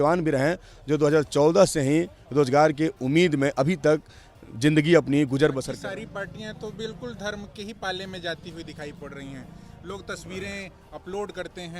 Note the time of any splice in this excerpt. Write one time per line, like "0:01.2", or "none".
0:05.7